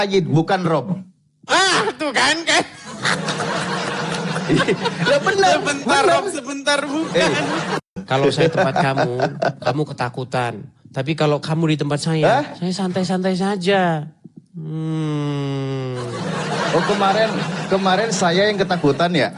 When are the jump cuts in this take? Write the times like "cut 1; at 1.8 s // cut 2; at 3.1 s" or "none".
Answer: cut 1; at 8.0 s

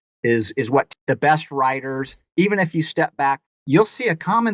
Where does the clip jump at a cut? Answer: cut 1; at 0.9 s // cut 2; at 3.4 s

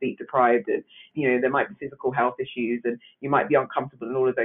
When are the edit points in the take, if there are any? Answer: cut 1; at 1.1 s

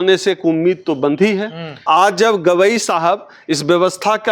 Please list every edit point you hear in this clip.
cut 1; at 1.8 s

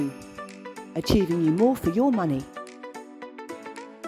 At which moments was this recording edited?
cut 1; at 2.5 s

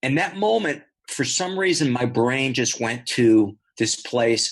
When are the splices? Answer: cut 1; at 0.9 s // cut 2; at 3.6 s

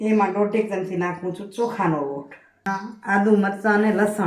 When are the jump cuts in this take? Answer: cut 1; at 2.7 s

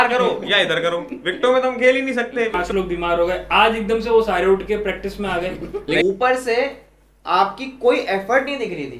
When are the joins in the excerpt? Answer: cut 1; at 2.6 s // cut 2; at 6.0 s

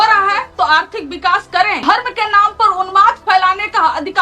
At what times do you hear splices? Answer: cut 1; at 1.8 s

